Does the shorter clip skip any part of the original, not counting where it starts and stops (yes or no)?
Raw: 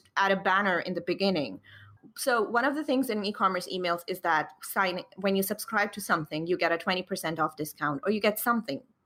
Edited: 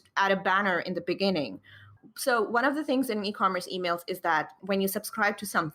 yes